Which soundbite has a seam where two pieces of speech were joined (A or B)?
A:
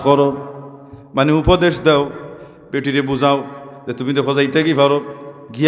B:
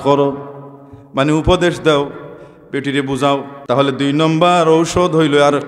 B